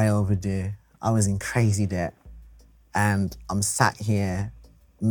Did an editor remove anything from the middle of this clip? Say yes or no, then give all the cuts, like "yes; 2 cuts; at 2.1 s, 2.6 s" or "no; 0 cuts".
no; 0 cuts